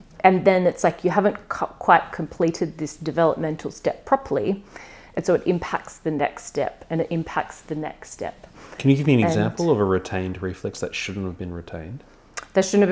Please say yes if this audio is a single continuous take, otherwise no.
yes